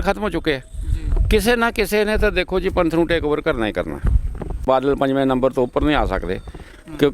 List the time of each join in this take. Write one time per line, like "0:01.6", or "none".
0:04.6